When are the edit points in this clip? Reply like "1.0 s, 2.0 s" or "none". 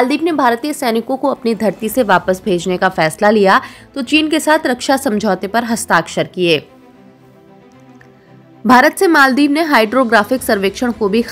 7.0 s, 8.6 s